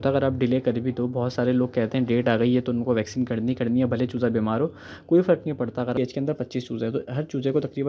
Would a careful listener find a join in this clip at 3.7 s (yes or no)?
no